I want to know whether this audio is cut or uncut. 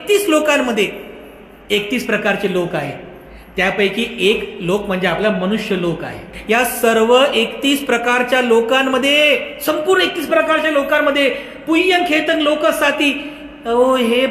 cut